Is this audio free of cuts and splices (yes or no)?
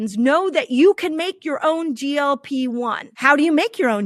no